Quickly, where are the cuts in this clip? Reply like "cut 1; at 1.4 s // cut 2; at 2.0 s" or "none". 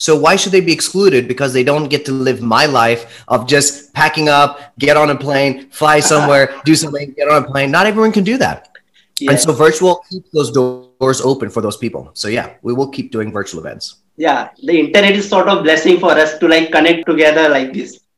cut 1; at 17.0 s